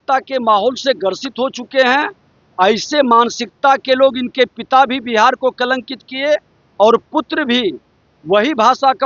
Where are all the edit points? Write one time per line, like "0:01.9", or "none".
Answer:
none

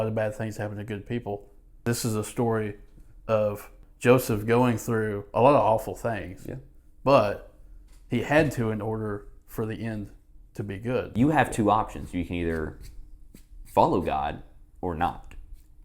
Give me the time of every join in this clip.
0:01.8
0:03.8
0:11.1

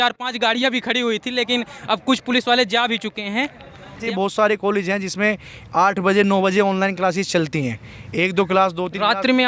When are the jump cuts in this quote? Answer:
0:04.0

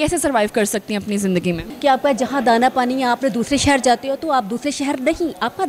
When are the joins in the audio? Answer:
0:01.7

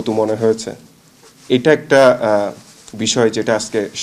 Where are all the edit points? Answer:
none

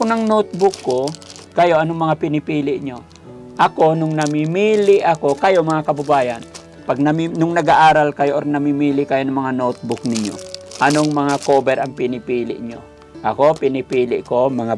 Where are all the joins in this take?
none

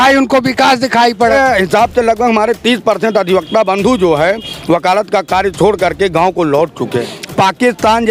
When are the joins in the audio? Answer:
0:01.3
0:07.2

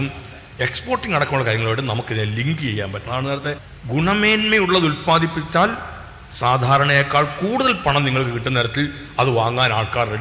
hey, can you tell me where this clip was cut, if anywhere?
0:03.7

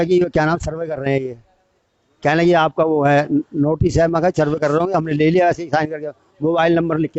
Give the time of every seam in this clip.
none

